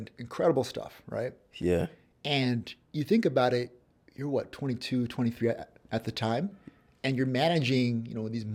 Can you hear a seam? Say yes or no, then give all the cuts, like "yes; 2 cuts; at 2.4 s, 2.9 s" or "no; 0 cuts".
no; 0 cuts